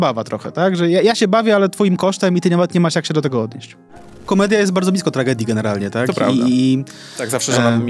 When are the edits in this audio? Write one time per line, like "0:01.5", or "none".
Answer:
0:04.2